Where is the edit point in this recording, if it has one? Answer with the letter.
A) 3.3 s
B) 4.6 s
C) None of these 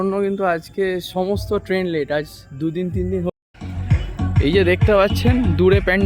A